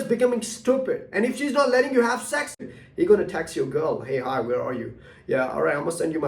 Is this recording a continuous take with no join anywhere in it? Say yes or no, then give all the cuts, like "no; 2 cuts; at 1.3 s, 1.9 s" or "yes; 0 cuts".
no; 1 cut; at 2.6 s